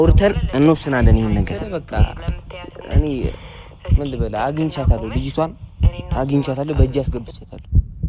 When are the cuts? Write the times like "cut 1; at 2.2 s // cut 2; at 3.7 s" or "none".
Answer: cut 1; at 1.6 s